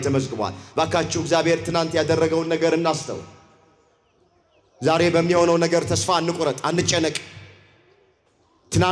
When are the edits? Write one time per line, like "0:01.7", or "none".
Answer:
none